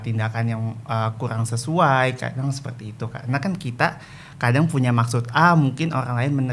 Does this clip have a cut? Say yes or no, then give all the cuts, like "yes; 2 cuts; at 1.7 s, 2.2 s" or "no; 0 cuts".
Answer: no; 0 cuts